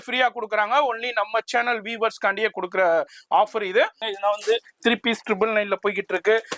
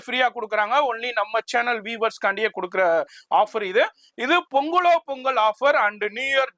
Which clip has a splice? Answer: first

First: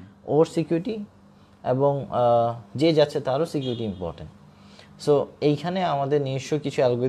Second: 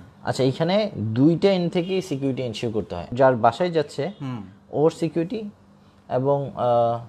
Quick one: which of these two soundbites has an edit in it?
second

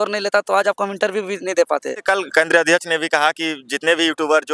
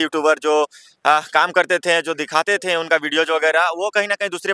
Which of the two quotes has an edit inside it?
first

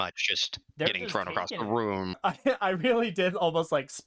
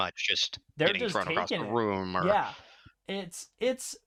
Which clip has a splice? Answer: first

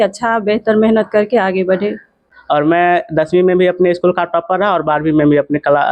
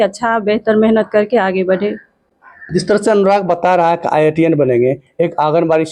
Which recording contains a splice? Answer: first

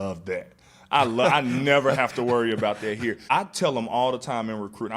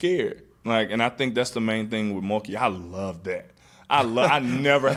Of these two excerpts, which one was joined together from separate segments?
first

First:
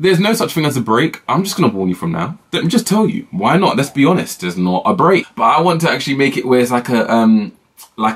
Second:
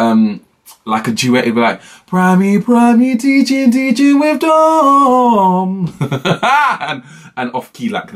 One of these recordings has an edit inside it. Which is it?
first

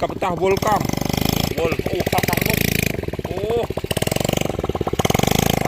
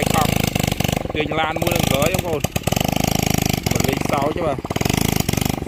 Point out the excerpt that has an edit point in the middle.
first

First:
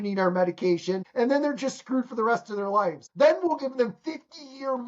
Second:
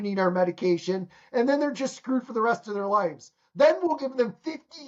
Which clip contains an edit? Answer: first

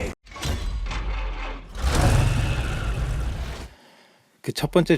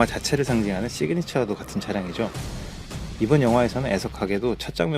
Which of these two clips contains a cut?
first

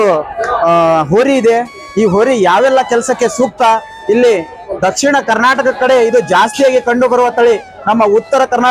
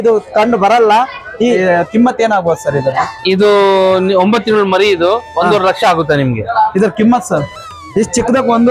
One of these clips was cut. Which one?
second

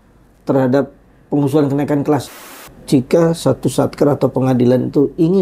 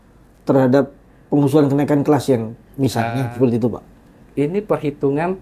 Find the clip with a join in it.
first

